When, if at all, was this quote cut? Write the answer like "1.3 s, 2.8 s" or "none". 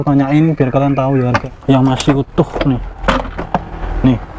1.4 s

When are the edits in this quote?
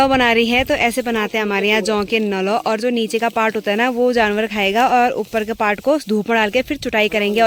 none

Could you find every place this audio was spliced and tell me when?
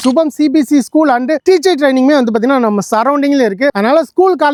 none

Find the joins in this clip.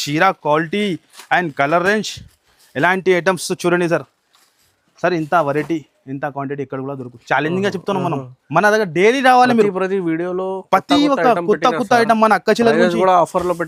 none

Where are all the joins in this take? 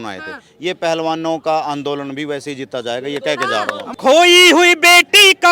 3.9 s

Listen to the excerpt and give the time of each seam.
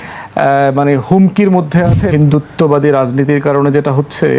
2.1 s

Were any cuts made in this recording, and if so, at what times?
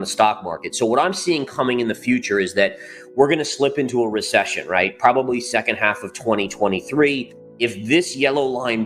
7.4 s

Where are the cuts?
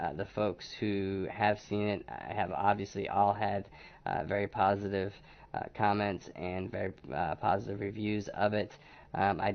8.0 s

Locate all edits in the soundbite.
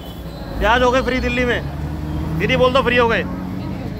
none

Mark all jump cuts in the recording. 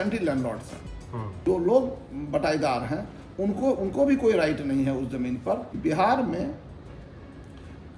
1.4 s, 5.7 s

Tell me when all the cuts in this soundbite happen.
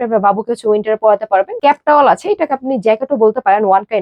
1.5 s

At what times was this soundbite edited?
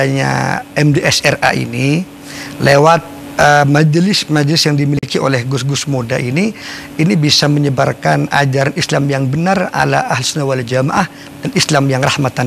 none

